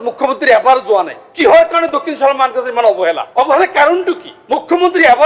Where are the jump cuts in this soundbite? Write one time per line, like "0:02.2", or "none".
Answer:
0:01.2
0:03.2
0:04.3